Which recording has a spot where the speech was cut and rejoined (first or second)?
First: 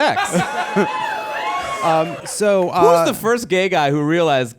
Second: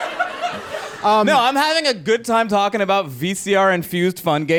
first